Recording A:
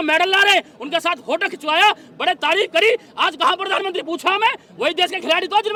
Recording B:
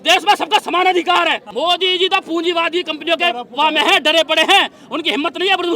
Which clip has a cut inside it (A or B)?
B